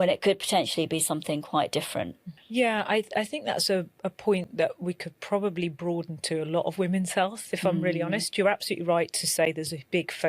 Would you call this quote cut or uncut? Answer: cut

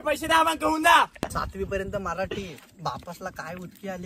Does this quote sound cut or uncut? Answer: cut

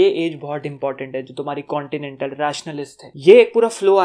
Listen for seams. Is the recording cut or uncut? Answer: cut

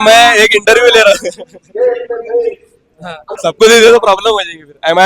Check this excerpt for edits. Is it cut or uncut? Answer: cut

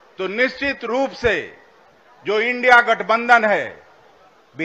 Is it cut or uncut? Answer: uncut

